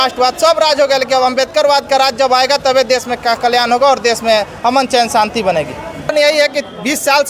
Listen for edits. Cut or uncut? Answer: cut